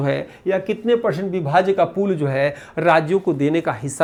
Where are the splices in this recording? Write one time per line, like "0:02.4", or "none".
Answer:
none